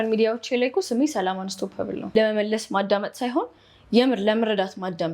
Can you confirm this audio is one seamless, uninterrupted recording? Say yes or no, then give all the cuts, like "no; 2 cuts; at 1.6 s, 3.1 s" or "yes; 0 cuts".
no; 1 cut; at 2.1 s